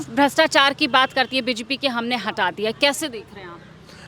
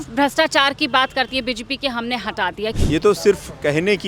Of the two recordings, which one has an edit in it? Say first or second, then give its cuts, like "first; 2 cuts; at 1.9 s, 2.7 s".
second; 1 cut; at 2.8 s